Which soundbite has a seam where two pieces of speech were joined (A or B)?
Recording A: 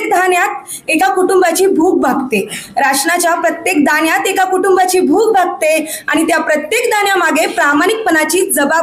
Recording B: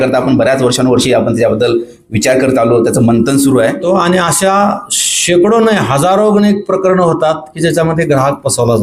B